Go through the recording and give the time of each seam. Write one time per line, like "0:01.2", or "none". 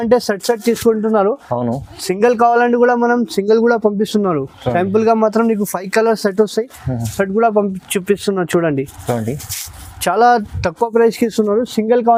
none